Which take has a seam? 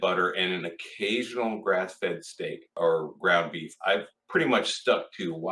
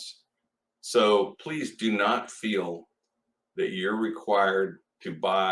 first; 2 cuts; at 2.6 s, 4.2 s

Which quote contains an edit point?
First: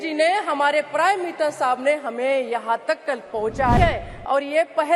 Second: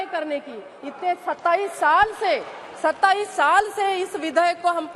first; 1 cut; at 3.8 s

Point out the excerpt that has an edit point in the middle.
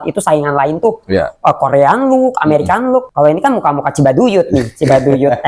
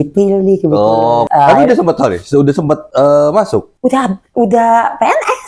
second; 1 cut; at 1.3 s

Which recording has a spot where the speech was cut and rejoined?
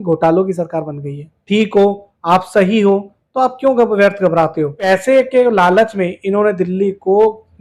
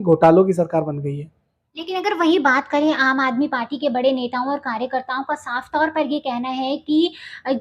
first; 2 cuts; at 1.3 s, 4.9 s

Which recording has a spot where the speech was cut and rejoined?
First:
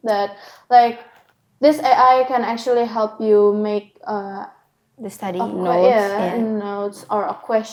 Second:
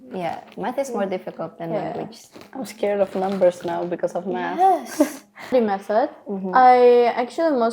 second; 1 cut; at 5.5 s

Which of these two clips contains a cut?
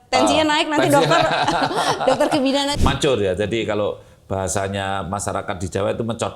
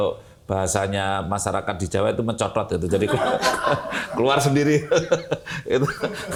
first; 1 cut; at 2.7 s

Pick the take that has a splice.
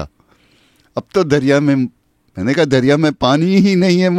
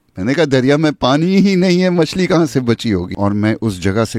second; 1 cut; at 3.1 s

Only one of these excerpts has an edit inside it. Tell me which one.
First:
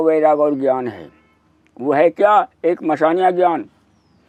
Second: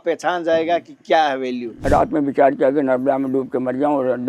second; 1 cut; at 1.7 s

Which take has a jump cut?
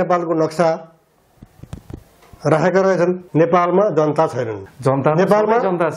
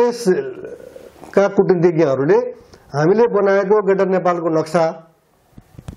first; 2 cuts; at 3.2 s, 4.6 s

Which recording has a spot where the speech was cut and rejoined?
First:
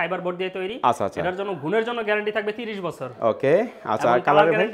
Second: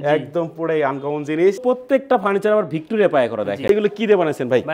second; 2 cuts; at 1.6 s, 3.7 s

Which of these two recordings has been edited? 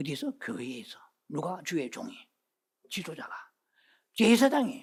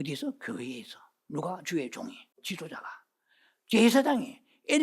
second; 1 cut; at 2.3 s

